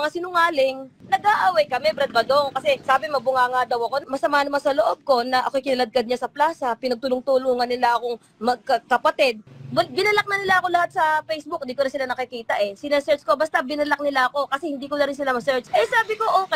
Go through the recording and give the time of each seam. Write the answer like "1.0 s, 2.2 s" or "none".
0.9 s, 2.8 s, 4.1 s, 9.5 s, 15.7 s